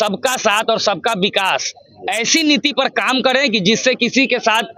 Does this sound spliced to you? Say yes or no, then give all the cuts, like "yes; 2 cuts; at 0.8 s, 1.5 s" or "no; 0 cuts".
no; 0 cuts